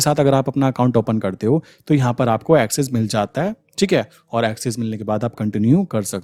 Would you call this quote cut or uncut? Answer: uncut